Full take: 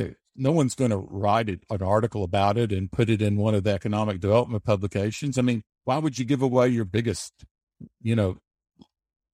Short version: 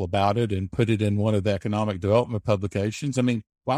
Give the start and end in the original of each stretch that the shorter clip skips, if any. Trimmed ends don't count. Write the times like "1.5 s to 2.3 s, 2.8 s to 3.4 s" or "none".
none